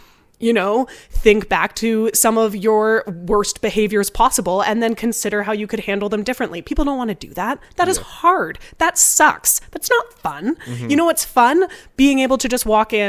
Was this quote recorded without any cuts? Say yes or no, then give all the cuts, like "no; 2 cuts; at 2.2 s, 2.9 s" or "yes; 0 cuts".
yes; 0 cuts